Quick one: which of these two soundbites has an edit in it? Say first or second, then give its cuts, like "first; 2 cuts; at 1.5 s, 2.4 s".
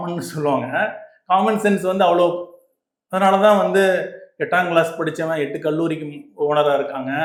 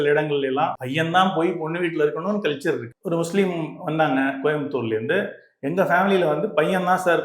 second; 2 cuts; at 0.8 s, 2.9 s